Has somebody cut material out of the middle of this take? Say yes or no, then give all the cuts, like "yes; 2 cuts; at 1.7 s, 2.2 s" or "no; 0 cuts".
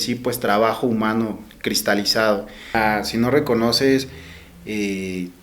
yes; 1 cut; at 2.7 s